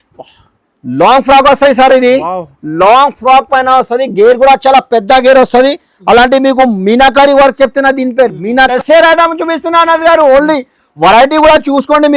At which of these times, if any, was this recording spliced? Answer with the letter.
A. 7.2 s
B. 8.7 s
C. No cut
B